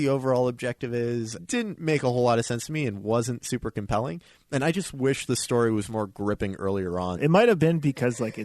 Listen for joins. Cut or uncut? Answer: cut